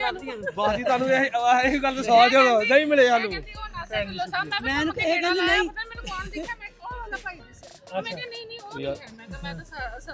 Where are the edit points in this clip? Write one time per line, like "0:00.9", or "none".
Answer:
none